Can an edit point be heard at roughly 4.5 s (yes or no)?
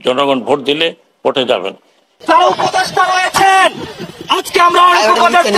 no